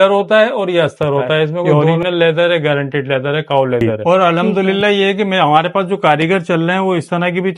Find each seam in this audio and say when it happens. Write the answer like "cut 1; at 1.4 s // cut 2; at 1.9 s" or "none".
cut 1; at 1.7 s // cut 2; at 3.8 s

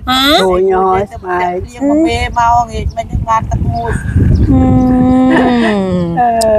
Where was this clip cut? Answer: none

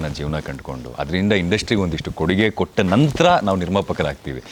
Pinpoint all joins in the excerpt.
none

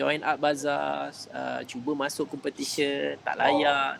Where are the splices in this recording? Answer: none

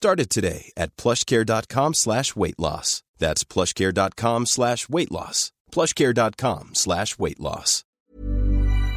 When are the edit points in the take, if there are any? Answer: cut 1; at 7.9 s

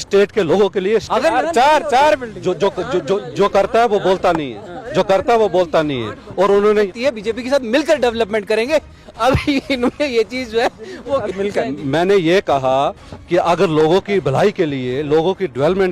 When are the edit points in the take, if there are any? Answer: cut 1; at 1.1 s // cut 2; at 6.9 s

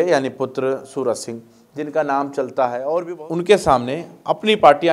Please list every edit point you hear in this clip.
cut 1; at 3.2 s

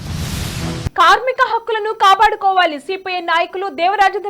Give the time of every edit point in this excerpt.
cut 1; at 0.9 s

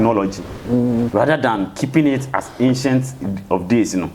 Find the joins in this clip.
cut 1; at 1.1 s

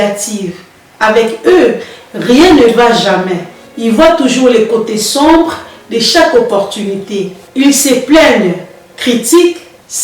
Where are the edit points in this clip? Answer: none

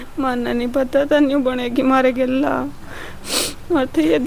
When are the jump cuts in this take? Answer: none

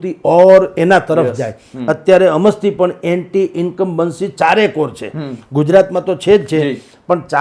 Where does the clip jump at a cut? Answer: none

